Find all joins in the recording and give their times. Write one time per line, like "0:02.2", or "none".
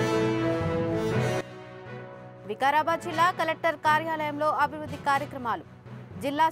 0:01.1
0:02.2